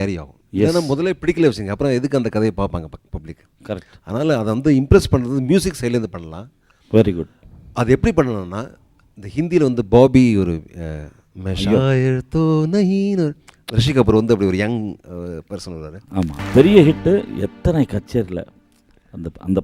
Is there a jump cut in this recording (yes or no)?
yes